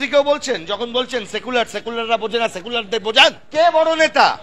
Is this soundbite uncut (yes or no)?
no